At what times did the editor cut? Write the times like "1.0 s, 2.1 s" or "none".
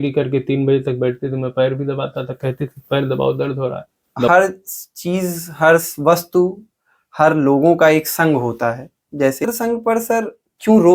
4.3 s, 9.4 s